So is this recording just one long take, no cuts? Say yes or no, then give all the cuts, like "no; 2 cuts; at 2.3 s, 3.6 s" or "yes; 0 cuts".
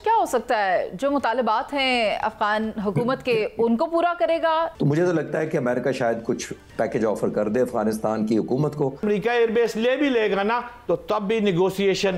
no; 3 cuts; at 4.7 s, 9.0 s, 10.7 s